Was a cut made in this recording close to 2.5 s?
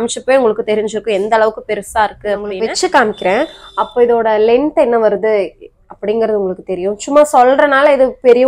yes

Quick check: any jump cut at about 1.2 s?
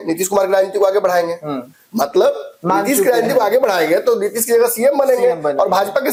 no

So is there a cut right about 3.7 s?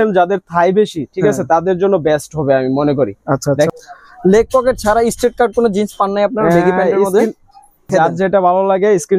yes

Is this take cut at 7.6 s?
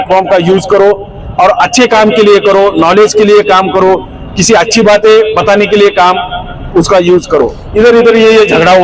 yes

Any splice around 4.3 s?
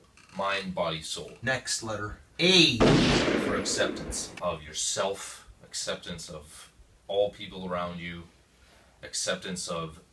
yes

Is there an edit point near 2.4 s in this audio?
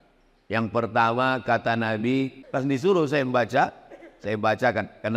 yes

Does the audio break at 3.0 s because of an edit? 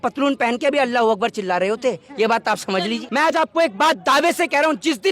yes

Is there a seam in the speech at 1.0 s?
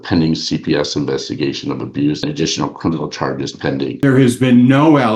no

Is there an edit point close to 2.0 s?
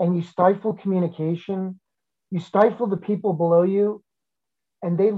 yes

